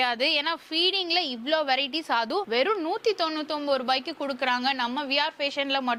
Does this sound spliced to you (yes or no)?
no